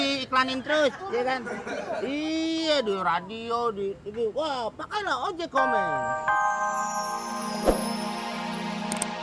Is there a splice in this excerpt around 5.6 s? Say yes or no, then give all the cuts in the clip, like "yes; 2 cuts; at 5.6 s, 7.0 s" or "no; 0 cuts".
yes; 1 cut; at 5.6 s